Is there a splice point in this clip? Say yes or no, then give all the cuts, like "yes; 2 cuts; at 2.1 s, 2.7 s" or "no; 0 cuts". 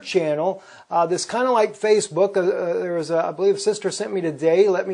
yes; 1 cut; at 1.8 s